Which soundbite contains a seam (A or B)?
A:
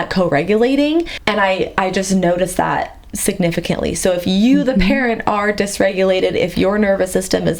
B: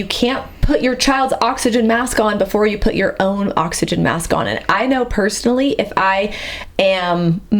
A